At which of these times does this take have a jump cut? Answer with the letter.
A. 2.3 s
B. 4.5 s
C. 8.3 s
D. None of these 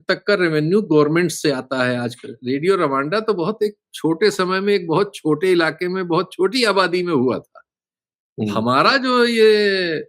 A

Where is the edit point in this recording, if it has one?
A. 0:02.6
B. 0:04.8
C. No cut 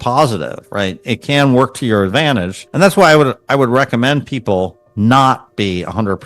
A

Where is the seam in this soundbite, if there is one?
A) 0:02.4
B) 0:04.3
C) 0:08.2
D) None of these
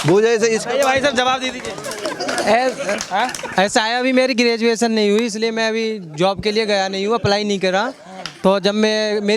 D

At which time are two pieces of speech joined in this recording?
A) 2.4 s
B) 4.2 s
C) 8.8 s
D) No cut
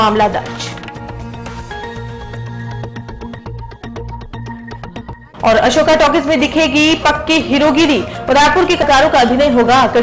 C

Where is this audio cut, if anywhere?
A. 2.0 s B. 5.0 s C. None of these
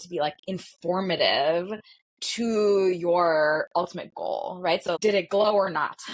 B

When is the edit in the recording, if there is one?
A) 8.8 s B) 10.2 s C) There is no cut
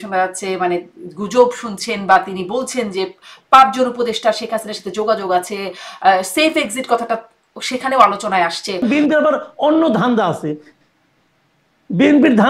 A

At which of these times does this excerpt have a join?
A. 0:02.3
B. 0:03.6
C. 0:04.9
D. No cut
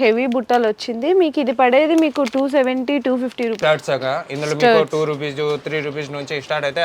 B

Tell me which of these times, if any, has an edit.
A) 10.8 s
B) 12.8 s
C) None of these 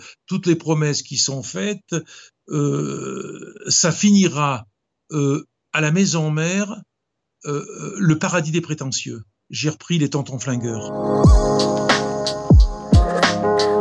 A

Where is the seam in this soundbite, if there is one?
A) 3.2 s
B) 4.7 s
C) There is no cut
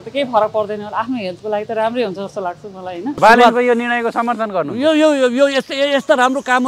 A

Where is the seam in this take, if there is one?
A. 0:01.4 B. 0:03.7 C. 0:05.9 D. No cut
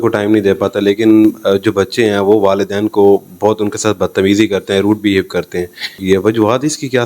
C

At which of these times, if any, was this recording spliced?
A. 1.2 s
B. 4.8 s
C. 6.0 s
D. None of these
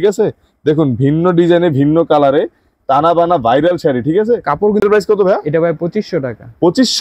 B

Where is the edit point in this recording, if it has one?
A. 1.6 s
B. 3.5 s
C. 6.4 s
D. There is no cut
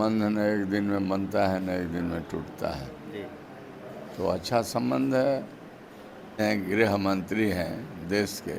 C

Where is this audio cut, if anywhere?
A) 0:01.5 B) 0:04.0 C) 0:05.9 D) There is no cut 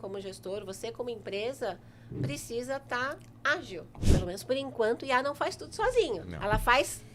B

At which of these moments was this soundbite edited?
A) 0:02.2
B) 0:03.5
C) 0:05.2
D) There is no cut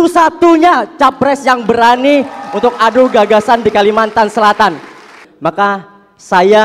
C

